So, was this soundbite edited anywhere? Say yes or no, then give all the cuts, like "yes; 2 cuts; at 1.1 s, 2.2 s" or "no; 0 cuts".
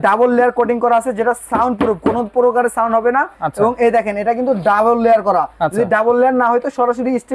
no; 0 cuts